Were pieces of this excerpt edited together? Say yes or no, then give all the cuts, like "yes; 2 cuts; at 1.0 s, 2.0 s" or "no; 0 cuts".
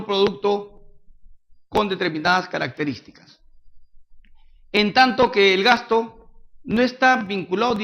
no; 0 cuts